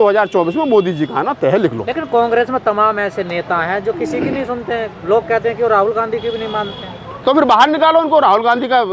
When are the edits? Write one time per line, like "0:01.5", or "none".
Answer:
none